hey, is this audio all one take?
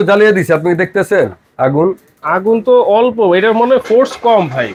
yes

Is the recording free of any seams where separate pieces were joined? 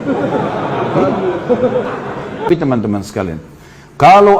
no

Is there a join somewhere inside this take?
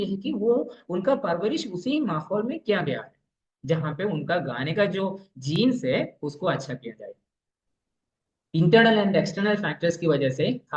yes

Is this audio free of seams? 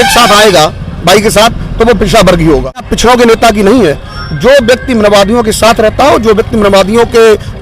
no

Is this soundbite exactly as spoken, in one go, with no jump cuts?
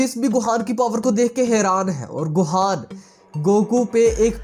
yes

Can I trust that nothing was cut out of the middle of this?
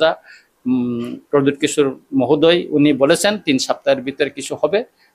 yes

